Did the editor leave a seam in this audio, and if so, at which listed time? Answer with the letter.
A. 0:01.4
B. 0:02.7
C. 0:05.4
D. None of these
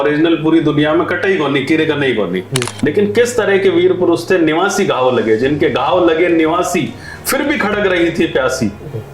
B